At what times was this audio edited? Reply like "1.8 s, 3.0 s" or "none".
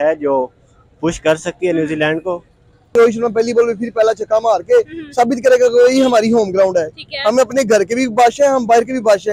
2.9 s

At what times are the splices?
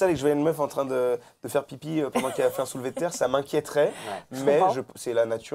none

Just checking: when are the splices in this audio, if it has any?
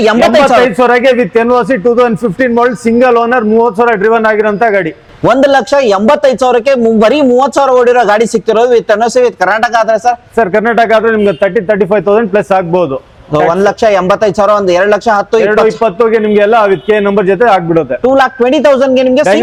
none

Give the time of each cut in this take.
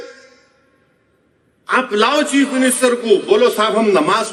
none

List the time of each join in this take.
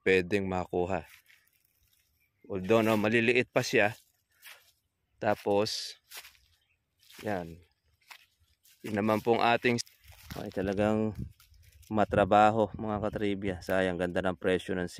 9.8 s

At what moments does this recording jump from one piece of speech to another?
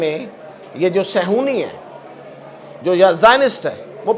none

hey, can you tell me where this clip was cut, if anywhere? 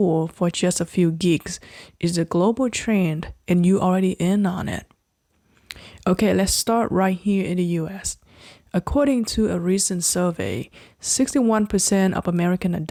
none

